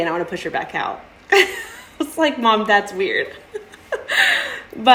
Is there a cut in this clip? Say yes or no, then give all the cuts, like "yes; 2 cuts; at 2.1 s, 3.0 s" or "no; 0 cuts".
no; 0 cuts